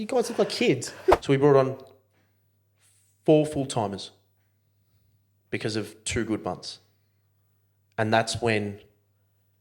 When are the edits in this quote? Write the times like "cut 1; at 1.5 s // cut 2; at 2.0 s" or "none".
cut 1; at 1.2 s

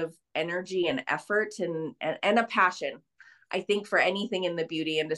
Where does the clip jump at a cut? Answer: none

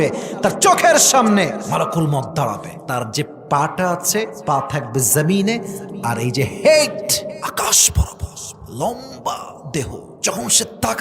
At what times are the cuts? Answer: cut 1; at 1.6 s // cut 2; at 2.7 s // cut 3; at 4.3 s // cut 4; at 7.4 s // cut 5; at 10.1 s

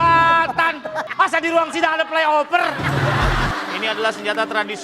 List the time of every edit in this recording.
cut 1; at 1.0 s // cut 2; at 3.4 s

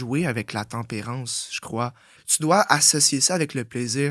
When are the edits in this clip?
cut 1; at 2.2 s

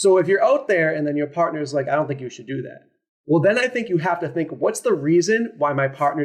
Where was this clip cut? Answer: none

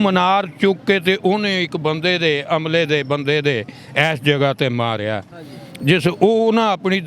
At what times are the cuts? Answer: none

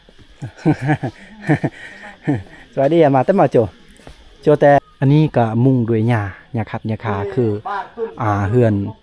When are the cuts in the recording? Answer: cut 1; at 4.8 s

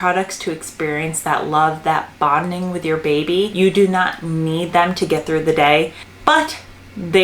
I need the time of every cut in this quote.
cut 1; at 3.5 s // cut 2; at 6.0 s

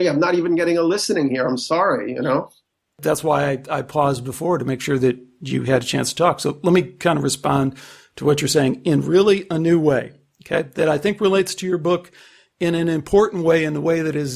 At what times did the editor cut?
cut 1; at 3.0 s

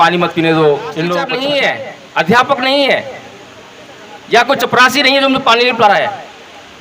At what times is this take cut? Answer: cut 1; at 1.6 s

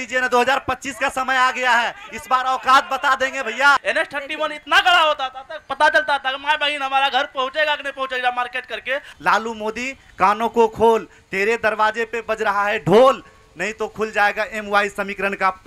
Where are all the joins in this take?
cut 1; at 3.8 s // cut 2; at 9.1 s

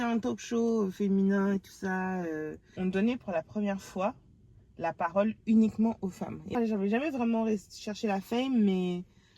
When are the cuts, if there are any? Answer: cut 1; at 2.6 s // cut 2; at 6.5 s

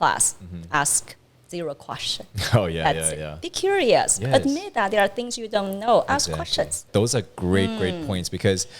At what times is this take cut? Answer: cut 1; at 6.8 s

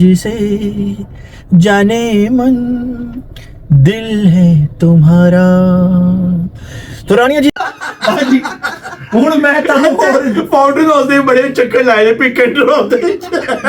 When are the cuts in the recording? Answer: cut 1; at 7.5 s

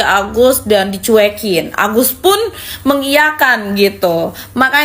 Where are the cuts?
none

